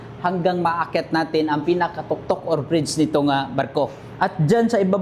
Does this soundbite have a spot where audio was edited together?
no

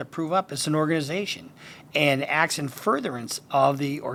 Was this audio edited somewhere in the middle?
no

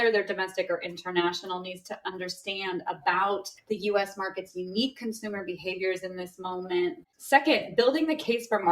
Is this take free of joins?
no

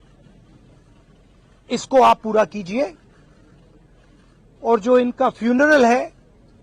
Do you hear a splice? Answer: no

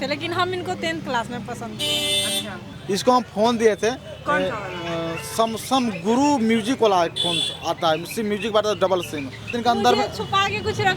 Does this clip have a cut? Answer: yes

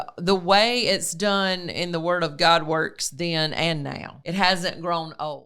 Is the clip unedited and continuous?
no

